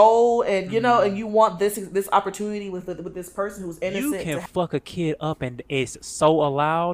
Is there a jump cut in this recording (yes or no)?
yes